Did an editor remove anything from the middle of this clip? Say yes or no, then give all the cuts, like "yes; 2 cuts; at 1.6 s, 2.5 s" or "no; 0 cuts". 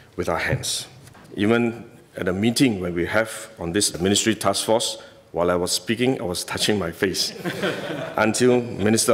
yes; 1 cut; at 1.2 s